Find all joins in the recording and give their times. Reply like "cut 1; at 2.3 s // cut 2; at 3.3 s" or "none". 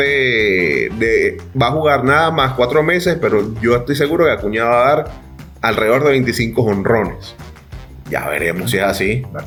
none